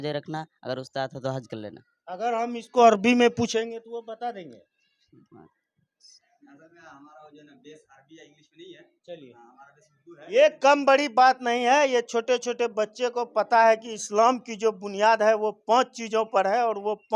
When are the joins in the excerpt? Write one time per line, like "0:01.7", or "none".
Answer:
none